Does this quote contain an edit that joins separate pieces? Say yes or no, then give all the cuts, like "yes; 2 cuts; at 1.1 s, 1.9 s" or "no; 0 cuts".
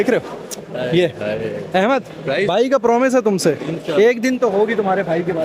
no; 0 cuts